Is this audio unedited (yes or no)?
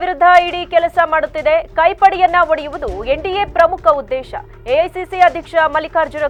yes